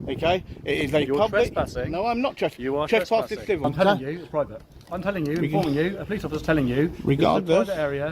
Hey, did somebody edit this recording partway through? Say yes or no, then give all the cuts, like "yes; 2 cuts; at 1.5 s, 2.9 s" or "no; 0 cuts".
yes; 1 cut; at 3.6 s